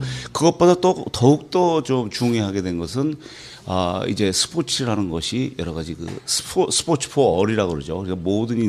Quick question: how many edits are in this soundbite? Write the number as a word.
zero